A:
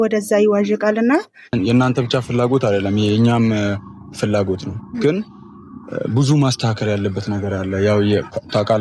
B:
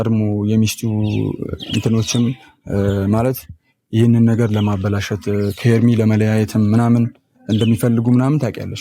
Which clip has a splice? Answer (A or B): A